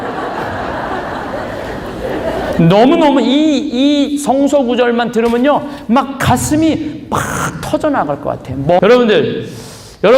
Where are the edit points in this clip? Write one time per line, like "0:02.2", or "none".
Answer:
0:08.8

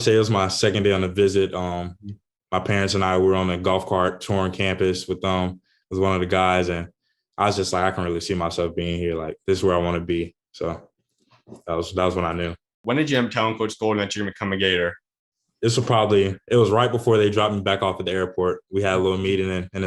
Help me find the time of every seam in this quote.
0:12.8

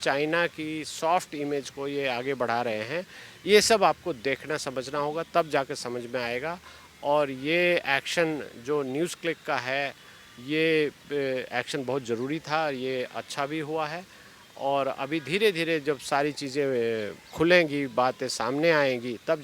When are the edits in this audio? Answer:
none

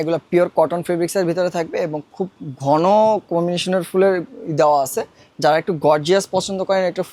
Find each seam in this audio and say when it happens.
none

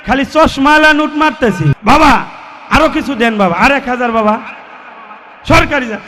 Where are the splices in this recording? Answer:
0:01.8

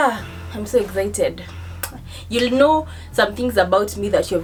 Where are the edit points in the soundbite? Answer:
none

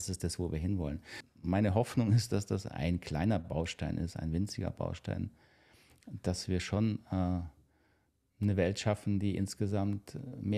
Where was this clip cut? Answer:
0:01.2

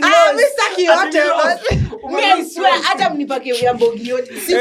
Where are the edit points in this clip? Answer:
none

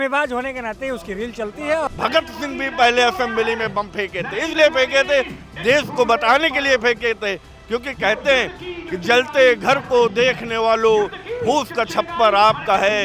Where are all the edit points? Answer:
0:01.9

